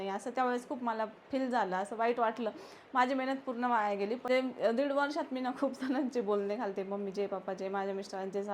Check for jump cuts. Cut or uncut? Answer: cut